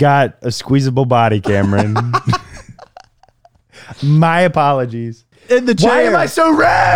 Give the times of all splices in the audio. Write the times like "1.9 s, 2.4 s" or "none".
5.3 s

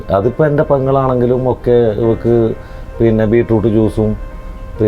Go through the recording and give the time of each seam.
none

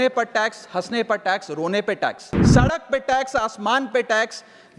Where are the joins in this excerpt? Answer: 2.3 s

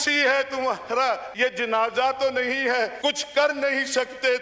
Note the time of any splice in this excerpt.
1.3 s, 2.9 s

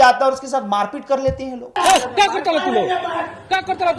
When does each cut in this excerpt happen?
1.8 s

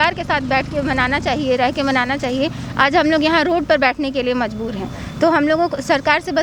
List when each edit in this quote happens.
none

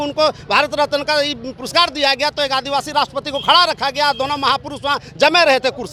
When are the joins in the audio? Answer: none

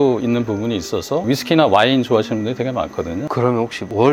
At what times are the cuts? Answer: 1.2 s, 3.2 s

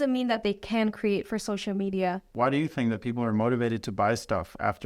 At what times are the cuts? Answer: 2.3 s

